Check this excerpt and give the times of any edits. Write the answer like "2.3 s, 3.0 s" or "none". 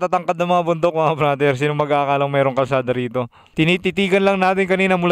3.4 s